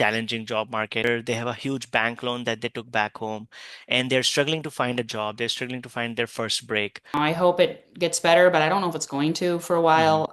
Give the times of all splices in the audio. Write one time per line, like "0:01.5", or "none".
0:01.0
0:07.1